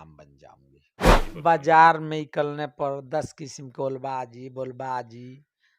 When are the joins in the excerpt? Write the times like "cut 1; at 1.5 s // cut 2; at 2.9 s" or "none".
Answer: cut 1; at 1.1 s